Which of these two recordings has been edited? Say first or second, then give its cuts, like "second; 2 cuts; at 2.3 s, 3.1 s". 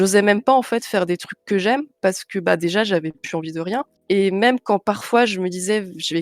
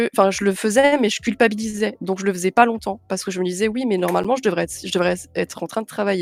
first; 1 cut; at 3.9 s